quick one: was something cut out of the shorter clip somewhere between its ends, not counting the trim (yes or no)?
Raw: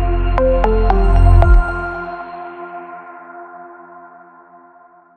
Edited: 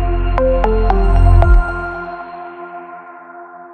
no